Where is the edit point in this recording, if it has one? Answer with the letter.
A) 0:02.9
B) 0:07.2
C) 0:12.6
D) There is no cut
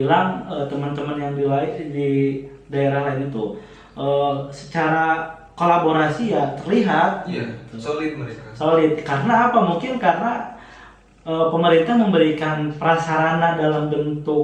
D